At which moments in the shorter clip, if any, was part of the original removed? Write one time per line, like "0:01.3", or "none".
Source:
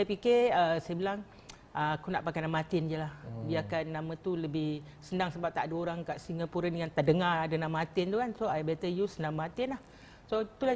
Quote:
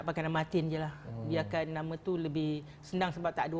none